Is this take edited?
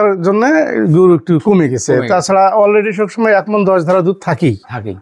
no; 0 cuts

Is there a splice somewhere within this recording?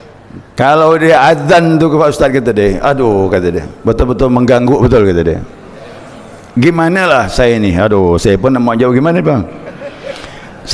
no; 0 cuts

